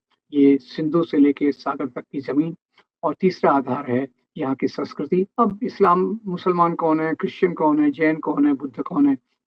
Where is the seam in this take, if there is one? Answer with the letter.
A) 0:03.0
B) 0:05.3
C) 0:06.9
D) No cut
B